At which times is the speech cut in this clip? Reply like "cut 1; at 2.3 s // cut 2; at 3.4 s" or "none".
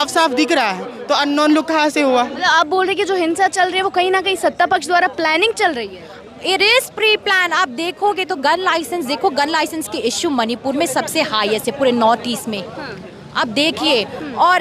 cut 1; at 2.3 s

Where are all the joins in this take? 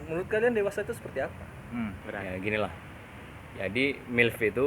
cut 1; at 2.0 s

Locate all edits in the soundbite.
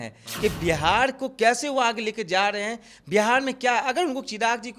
none

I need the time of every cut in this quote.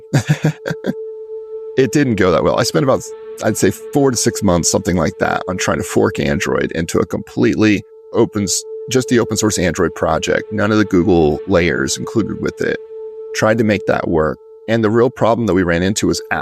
cut 1; at 1.7 s

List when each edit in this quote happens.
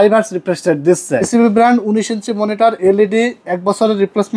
cut 1; at 1.3 s

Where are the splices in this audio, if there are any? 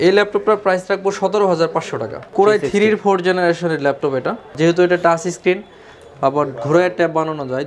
cut 1; at 2.2 s // cut 2; at 4.5 s

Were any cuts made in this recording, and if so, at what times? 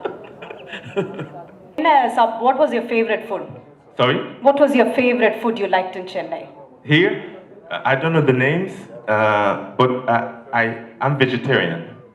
cut 1; at 1.8 s

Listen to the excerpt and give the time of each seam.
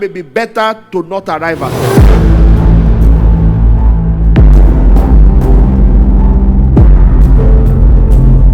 cut 1; at 1.7 s

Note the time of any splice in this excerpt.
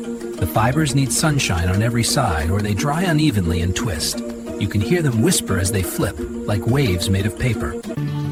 none

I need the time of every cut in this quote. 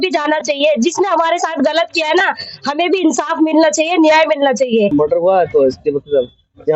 cut 1; at 4.9 s

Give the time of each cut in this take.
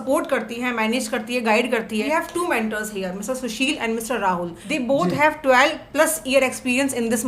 cut 1; at 2.0 s // cut 2; at 4.6 s

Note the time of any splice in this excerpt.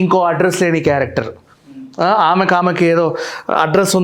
none

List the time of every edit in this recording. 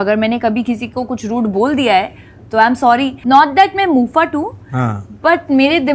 cut 1; at 3.1 s

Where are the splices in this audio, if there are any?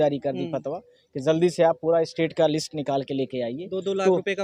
none

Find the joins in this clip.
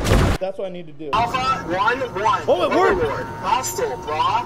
cut 1; at 1.1 s

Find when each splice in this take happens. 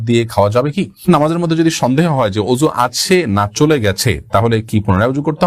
cut 1; at 1.1 s

